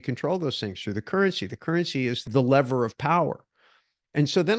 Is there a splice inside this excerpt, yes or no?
no